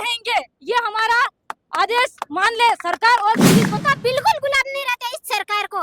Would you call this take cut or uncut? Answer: cut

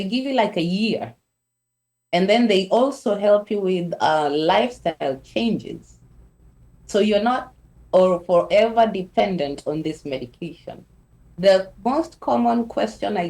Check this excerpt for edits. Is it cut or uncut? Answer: cut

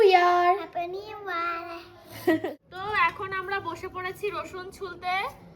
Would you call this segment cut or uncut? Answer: cut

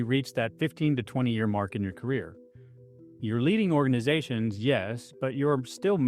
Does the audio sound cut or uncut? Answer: cut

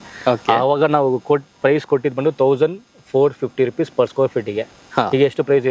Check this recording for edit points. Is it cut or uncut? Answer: uncut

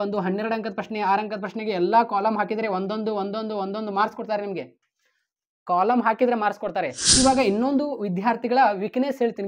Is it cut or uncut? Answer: cut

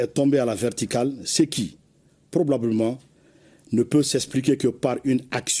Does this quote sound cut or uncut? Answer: uncut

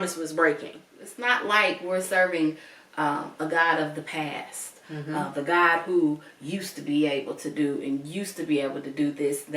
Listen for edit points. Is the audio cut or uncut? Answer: cut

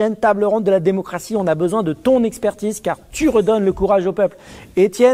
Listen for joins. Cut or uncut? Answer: uncut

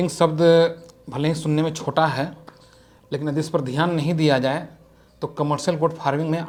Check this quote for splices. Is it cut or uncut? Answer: uncut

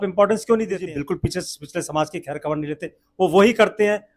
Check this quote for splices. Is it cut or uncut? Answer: cut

